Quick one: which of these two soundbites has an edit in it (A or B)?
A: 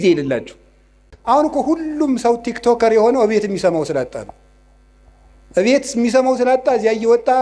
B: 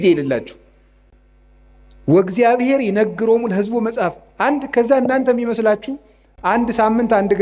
A